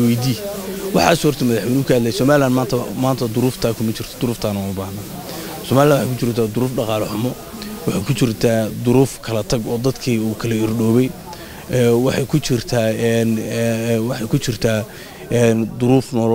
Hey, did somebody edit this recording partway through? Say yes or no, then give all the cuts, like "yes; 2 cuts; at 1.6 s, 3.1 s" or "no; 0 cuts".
no; 0 cuts